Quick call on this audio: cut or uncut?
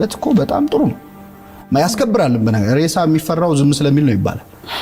uncut